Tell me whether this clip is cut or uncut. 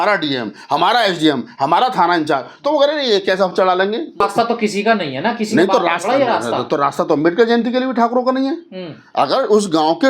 cut